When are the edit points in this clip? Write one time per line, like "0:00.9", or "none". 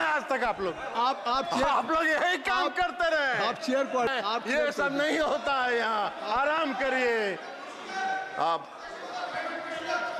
none

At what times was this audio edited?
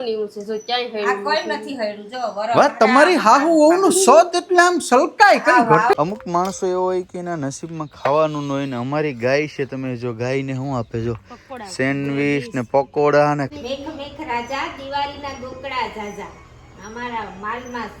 0:05.9
0:13.5

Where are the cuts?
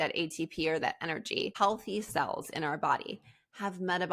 0:01.5

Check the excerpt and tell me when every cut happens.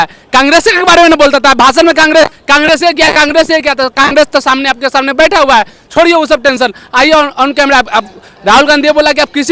none

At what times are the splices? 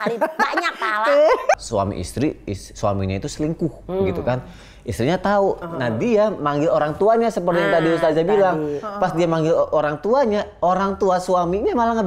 0:01.5
0:05.6

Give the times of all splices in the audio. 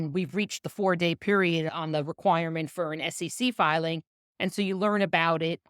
0:01.7

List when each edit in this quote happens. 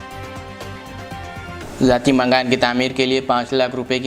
0:01.6

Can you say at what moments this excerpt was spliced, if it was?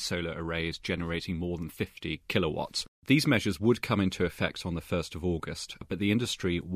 0:03.0
0:05.8

